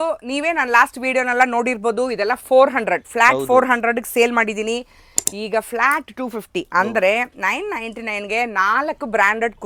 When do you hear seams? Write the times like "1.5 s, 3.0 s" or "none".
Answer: none